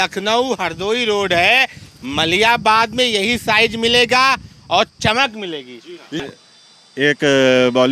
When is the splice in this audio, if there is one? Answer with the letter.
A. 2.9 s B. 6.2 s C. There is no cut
B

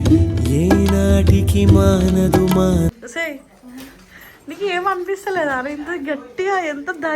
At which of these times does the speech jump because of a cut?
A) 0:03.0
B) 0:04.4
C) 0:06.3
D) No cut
A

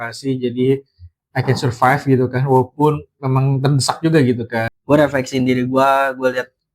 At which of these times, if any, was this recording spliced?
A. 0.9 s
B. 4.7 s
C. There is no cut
B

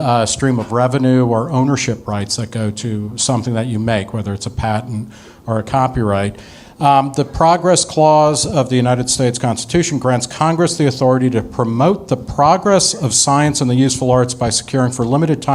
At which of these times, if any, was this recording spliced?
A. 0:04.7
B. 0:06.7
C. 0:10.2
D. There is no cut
C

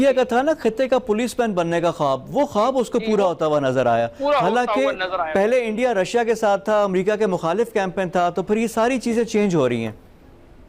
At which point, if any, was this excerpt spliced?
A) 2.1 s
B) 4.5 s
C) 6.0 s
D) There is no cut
D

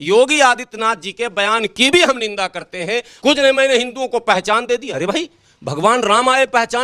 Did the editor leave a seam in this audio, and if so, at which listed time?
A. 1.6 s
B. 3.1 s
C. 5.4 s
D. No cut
B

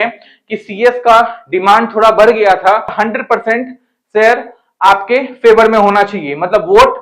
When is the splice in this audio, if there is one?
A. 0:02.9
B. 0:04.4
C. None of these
A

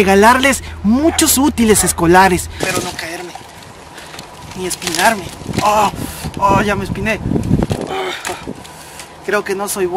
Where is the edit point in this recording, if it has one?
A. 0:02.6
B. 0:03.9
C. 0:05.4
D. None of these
A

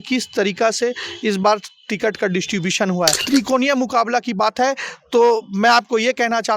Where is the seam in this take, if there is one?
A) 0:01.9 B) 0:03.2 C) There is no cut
B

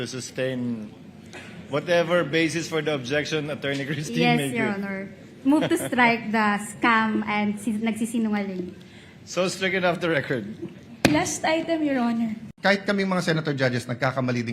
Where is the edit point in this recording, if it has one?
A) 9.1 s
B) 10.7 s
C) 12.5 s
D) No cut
C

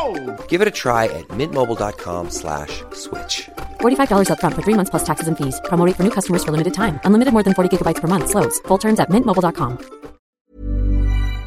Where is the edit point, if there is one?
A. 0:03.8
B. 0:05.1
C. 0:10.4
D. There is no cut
C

